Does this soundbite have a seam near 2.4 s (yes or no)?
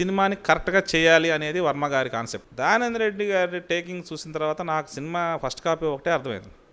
yes